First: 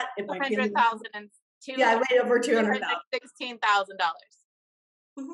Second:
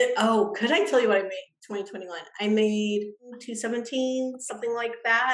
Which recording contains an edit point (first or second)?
second